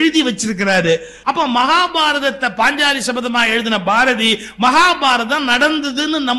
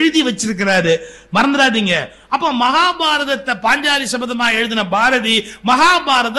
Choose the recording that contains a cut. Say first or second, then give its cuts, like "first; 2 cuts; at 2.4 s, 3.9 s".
first; 1 cut; at 1.1 s